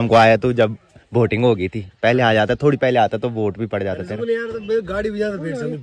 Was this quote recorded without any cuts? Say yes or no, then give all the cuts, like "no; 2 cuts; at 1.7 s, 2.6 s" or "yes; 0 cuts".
yes; 0 cuts